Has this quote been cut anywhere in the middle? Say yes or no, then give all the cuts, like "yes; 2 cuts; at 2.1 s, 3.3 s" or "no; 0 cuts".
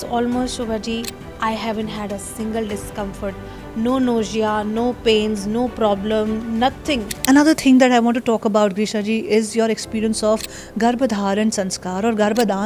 yes; 1 cut; at 7.1 s